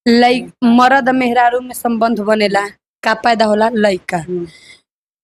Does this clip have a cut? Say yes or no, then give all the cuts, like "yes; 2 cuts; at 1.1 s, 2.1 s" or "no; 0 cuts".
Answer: no; 0 cuts